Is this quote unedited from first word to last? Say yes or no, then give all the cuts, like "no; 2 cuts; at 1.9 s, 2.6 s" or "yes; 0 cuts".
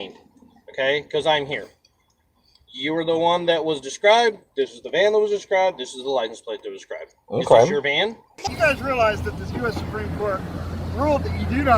no; 1 cut; at 8.3 s